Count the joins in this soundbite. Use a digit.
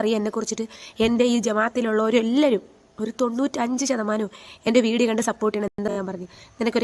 1